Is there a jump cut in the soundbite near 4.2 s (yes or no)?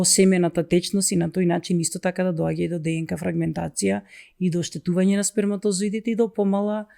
no